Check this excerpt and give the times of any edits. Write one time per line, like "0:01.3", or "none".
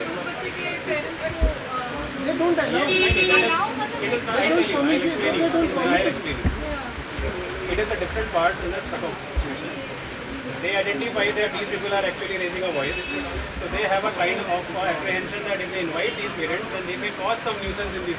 none